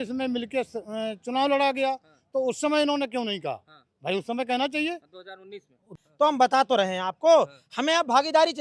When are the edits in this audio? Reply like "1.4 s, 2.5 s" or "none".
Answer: 5.9 s